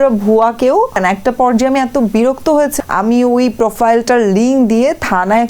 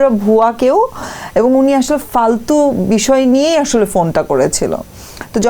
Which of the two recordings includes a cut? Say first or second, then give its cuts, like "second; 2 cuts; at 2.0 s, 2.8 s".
first; 2 cuts; at 1.0 s, 2.7 s